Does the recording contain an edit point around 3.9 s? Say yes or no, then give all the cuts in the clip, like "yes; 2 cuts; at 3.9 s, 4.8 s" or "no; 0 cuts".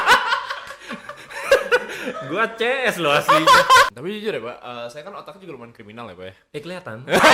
yes; 1 cut; at 3.9 s